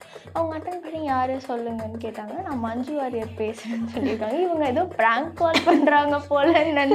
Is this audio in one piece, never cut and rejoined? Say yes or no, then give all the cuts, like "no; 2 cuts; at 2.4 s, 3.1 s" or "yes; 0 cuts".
yes; 0 cuts